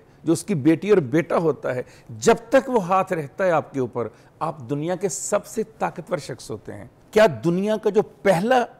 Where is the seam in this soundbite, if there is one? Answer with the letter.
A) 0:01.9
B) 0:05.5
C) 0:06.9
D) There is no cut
C